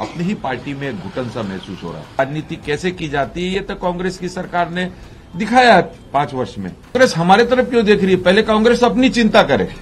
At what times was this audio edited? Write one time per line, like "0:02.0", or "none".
0:02.2
0:06.9